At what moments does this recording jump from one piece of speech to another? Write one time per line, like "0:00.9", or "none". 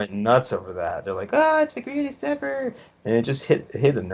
0:02.8